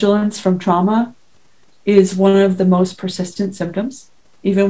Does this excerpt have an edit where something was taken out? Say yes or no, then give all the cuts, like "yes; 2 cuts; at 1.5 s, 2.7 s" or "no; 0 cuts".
no; 0 cuts